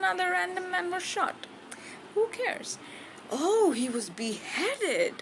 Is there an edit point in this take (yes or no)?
no